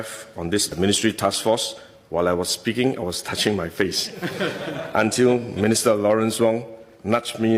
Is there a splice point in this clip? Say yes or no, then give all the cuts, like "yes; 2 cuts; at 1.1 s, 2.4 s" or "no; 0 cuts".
no; 0 cuts